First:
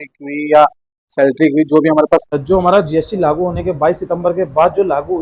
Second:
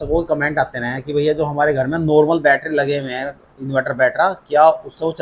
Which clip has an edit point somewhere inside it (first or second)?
first